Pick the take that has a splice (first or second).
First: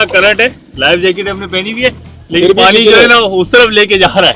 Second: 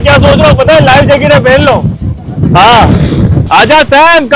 second